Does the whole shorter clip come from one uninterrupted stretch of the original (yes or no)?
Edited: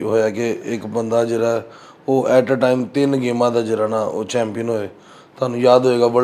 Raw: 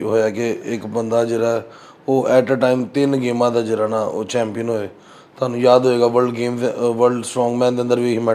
yes